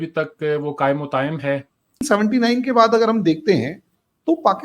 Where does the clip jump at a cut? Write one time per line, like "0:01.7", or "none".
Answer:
0:02.0